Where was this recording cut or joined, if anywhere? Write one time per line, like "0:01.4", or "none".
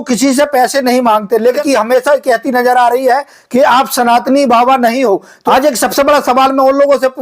0:01.6
0:05.5